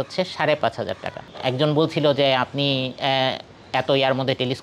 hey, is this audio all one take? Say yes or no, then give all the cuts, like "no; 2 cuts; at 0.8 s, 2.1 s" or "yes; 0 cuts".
no; 1 cut; at 1.3 s